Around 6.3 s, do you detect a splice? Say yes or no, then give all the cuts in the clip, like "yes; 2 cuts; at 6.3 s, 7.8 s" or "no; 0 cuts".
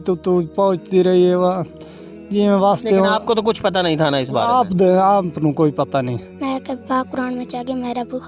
yes; 1 cut; at 6.3 s